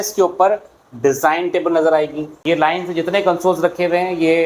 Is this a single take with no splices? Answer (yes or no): no